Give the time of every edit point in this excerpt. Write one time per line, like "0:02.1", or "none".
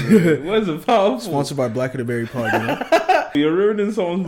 0:03.3